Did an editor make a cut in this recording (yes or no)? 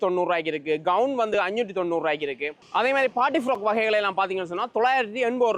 no